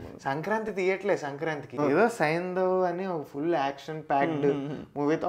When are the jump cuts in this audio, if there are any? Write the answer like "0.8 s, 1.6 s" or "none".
1.8 s